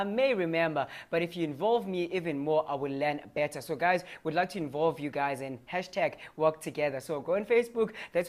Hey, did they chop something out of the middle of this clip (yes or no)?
yes